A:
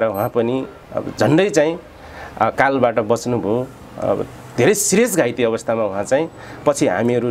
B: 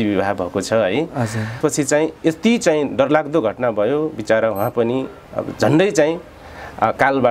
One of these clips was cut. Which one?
B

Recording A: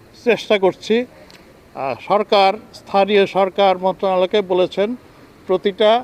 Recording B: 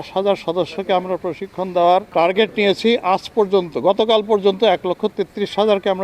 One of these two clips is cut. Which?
B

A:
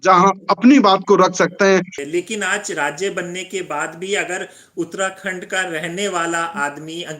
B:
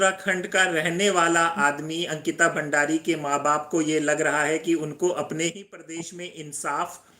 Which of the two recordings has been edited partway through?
A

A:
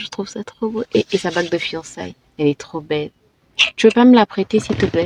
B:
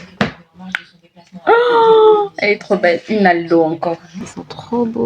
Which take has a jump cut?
B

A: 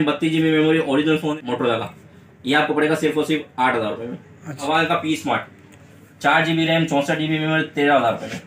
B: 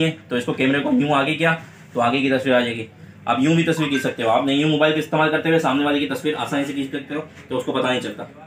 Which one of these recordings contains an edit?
A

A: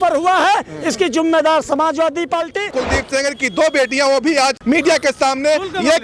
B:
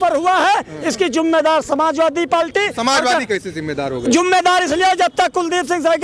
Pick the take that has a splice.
A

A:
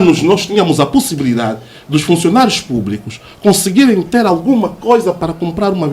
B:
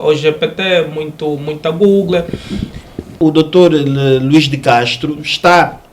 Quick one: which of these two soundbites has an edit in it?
B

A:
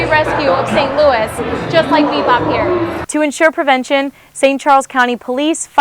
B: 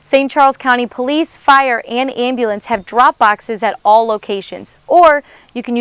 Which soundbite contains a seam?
A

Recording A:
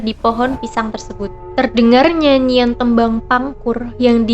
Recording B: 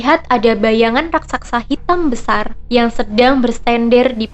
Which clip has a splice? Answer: A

